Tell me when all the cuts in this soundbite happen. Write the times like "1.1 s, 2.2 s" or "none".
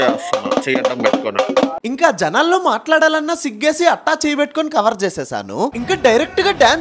5.8 s